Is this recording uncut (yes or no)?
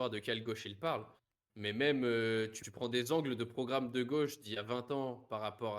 no